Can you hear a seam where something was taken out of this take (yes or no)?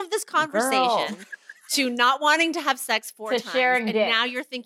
no